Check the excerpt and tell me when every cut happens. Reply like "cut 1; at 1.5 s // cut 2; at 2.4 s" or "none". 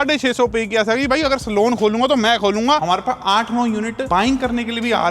cut 1; at 2.8 s // cut 2; at 4.0 s